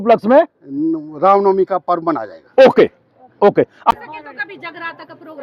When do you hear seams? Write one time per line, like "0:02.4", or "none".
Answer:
0:03.9